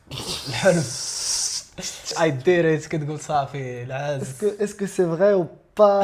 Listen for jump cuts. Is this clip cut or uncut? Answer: cut